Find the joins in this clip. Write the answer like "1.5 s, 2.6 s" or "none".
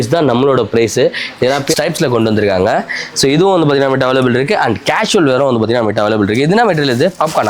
1.7 s